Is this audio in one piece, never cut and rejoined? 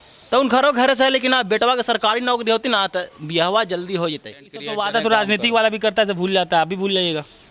no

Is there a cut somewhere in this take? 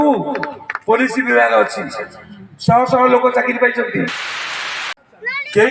yes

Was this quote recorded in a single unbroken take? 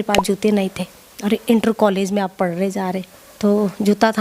no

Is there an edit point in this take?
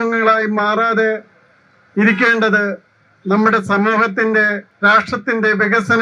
yes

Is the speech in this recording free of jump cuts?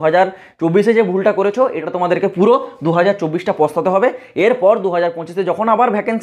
yes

